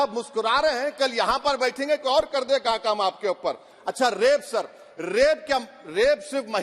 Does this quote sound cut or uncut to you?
uncut